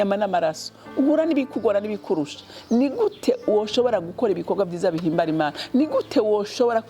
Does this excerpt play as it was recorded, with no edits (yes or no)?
yes